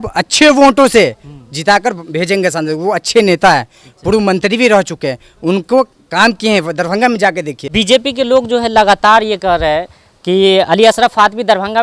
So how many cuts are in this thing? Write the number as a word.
zero